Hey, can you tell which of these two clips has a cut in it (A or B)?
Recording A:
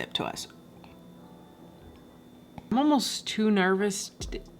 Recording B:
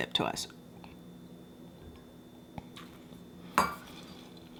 A